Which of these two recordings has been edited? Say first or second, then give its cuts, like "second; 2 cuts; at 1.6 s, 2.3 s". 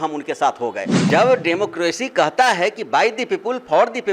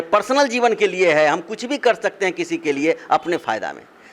first; 1 cut; at 0.9 s